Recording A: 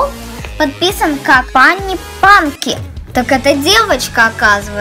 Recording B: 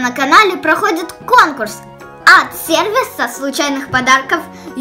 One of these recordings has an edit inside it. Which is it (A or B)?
A